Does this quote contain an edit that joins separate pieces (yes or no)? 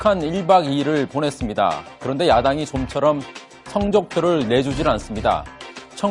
yes